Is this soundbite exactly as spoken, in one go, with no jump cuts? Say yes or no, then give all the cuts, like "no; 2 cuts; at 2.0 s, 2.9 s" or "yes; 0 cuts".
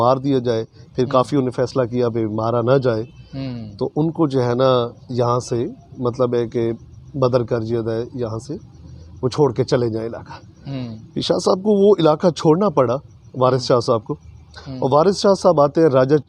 yes; 0 cuts